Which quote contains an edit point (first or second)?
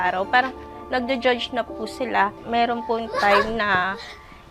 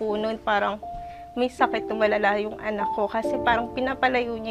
first